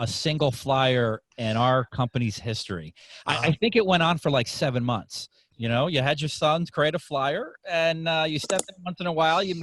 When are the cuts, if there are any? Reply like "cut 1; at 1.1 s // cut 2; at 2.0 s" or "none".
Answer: cut 1; at 5.4 s